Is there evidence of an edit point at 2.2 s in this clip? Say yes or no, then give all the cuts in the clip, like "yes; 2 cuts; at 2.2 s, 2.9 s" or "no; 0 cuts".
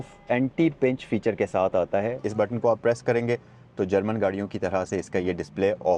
yes; 1 cut; at 2.2 s